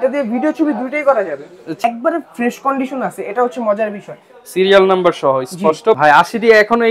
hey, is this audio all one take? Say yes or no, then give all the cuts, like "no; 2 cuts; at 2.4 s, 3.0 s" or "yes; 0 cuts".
no; 2 cuts; at 1.8 s, 6.0 s